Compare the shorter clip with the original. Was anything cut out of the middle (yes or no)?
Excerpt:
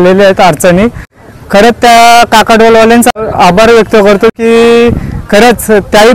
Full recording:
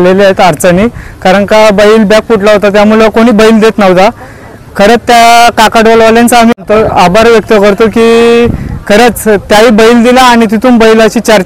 yes